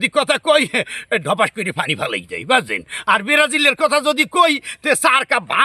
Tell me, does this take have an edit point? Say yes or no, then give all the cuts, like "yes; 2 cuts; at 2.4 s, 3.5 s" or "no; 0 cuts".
no; 0 cuts